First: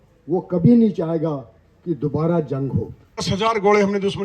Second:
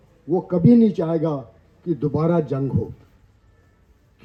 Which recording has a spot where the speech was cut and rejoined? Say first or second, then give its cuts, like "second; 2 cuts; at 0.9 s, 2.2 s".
first; 1 cut; at 3.2 s